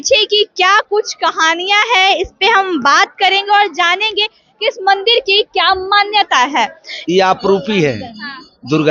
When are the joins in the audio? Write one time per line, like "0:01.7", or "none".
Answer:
none